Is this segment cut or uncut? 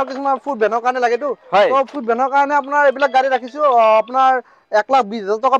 uncut